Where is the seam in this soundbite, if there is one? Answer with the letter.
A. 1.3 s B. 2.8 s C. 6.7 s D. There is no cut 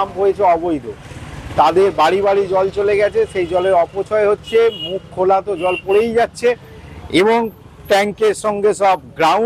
D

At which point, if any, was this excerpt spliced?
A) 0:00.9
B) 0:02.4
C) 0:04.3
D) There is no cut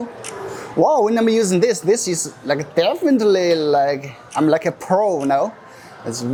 D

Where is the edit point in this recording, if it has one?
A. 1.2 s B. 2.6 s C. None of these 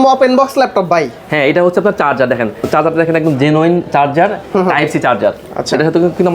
B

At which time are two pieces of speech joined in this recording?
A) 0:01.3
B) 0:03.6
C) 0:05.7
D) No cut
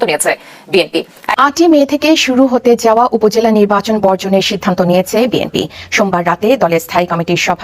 A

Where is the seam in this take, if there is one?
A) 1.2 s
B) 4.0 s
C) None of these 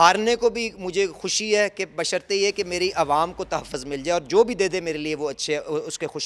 C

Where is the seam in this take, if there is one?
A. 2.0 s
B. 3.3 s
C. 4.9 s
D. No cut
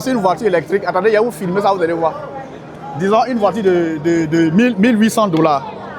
D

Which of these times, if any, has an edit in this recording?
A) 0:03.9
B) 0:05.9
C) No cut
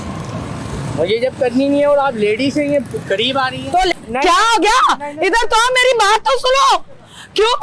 A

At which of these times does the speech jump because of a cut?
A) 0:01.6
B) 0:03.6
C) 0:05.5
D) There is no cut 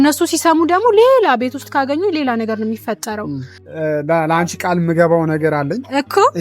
B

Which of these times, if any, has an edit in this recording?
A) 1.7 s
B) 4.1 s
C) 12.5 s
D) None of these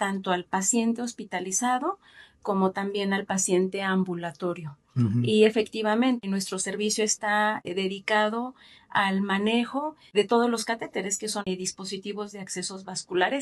D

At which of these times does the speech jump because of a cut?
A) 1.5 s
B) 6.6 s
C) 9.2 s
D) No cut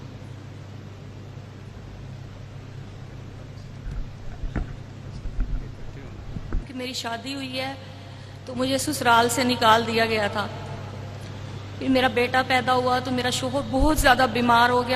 B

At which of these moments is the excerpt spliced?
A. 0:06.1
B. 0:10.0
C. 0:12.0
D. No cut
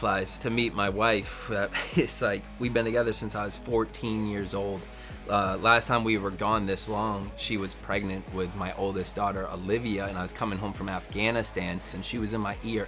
C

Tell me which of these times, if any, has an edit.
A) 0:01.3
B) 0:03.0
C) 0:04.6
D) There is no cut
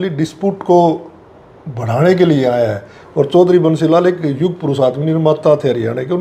B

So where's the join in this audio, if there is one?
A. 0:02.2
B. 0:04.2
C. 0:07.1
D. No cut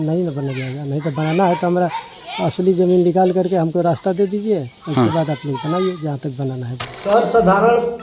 C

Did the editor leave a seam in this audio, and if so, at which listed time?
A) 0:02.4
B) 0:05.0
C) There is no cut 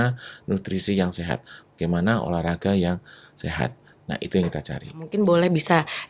B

